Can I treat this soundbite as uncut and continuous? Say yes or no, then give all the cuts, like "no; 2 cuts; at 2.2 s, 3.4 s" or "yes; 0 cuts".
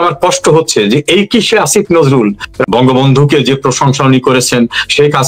no; 1 cut; at 2.5 s